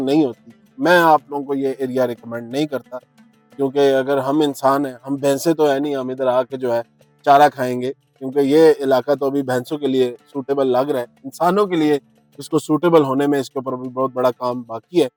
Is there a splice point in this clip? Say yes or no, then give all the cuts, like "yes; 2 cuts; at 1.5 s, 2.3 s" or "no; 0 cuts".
no; 0 cuts